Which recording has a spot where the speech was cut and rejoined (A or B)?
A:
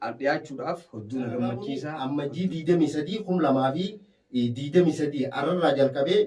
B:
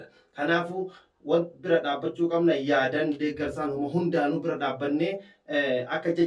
A